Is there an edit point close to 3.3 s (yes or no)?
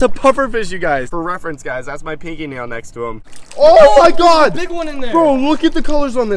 yes